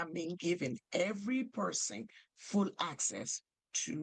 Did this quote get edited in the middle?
no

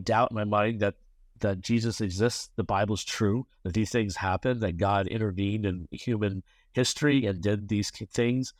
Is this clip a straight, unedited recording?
yes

